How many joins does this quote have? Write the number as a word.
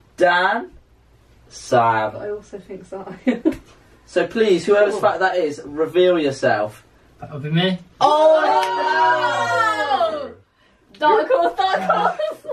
one